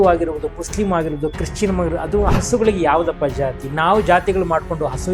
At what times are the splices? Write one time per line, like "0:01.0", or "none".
none